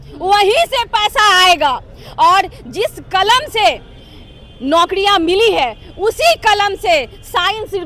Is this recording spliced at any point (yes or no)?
no